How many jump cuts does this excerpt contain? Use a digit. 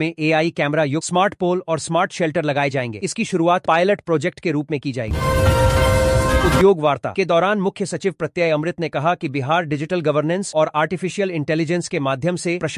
2